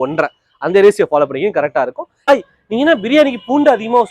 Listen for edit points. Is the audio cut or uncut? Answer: cut